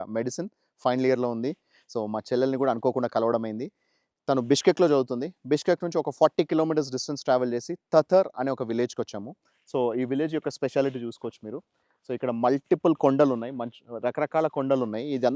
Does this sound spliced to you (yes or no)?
no